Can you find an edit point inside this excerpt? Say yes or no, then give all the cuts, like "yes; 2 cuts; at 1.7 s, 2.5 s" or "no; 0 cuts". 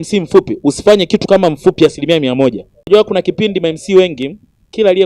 yes; 1 cut; at 2.9 s